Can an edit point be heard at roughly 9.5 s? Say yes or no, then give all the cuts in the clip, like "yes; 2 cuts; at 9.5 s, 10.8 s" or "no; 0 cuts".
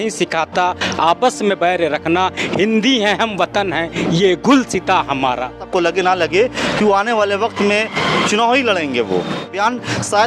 yes; 2 cuts; at 5.6 s, 9.5 s